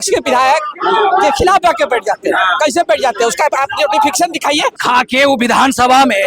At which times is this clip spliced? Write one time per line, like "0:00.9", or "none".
0:04.8